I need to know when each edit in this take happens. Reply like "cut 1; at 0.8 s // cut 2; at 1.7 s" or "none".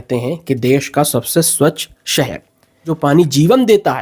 cut 1; at 2.9 s